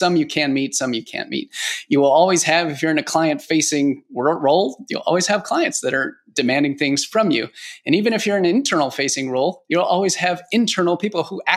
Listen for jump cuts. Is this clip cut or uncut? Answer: uncut